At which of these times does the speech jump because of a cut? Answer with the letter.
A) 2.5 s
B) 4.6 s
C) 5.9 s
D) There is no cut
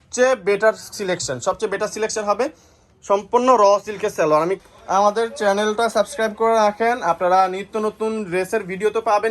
B